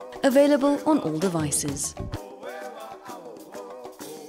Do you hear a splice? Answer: yes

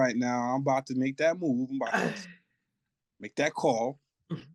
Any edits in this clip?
no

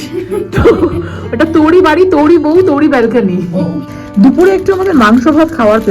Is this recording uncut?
no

